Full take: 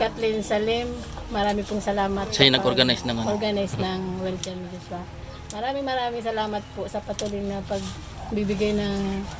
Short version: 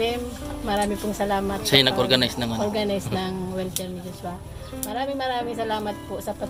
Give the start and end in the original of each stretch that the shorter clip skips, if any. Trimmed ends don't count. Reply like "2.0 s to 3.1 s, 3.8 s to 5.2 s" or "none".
none